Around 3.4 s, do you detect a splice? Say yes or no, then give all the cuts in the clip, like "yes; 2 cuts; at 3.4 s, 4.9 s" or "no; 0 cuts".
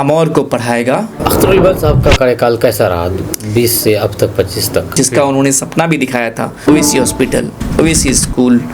no; 3 cuts; at 1.1 s, 4.9 s, 6.5 s